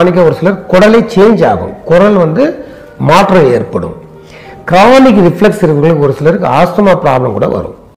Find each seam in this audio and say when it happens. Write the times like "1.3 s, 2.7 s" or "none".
none